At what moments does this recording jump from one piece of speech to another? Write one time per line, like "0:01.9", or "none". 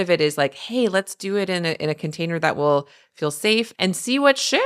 0:03.7